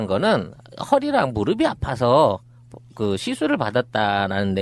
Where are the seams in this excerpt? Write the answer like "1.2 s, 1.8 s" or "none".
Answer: none